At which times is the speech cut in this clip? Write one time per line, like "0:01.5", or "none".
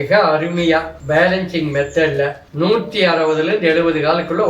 0:00.9
0:02.4